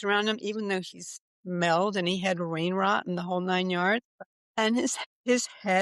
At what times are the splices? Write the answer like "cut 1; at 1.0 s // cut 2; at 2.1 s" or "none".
cut 1; at 4.0 s